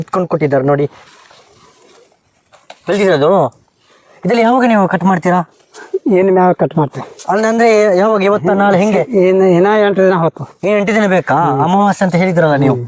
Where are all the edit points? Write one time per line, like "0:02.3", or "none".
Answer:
0:01.1